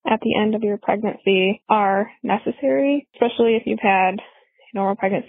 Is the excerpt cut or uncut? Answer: cut